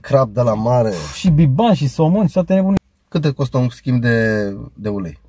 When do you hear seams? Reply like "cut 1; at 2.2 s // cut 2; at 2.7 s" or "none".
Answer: cut 1; at 2.8 s